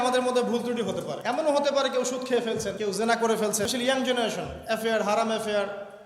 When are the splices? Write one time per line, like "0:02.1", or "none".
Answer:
0:01.1
0:02.8
0:03.7